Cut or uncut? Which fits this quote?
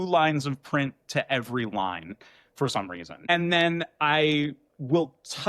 cut